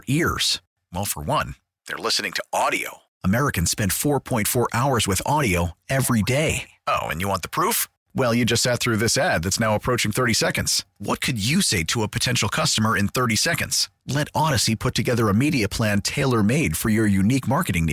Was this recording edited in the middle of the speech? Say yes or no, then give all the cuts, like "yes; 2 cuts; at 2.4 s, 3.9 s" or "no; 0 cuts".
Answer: no; 0 cuts